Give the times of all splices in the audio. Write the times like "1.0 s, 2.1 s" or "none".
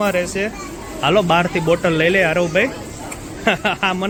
none